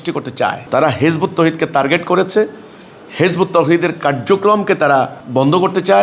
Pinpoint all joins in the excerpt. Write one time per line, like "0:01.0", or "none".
none